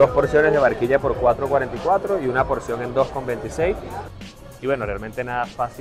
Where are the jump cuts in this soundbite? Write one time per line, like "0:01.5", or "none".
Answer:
0:04.1